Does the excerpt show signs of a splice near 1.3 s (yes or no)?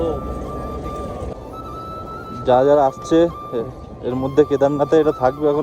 yes